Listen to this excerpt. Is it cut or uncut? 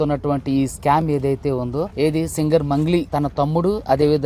cut